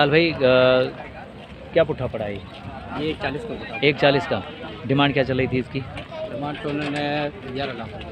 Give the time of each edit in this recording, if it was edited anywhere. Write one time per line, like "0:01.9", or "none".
none